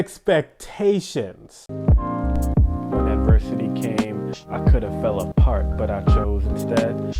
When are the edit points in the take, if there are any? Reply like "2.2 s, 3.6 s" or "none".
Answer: 1.7 s